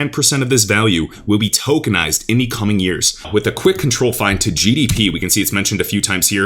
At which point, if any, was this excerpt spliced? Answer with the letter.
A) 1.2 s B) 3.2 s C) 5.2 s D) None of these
B